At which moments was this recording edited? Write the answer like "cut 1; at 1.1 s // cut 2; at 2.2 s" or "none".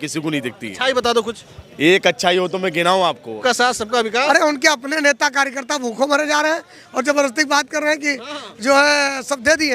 cut 1; at 3.3 s